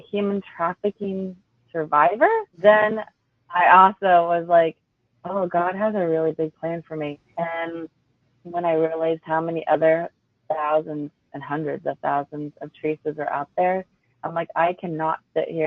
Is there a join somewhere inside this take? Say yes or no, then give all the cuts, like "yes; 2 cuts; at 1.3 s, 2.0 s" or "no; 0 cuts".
yes; 2 cuts; at 2.5 s, 7.2 s